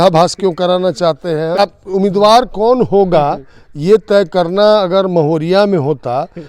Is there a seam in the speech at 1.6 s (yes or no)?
yes